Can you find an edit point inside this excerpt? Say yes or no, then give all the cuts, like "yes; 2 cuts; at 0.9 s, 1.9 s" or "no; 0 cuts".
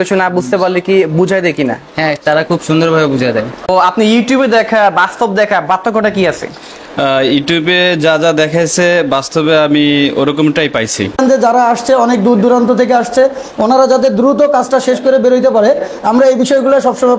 yes; 2 cuts; at 3.7 s, 11.2 s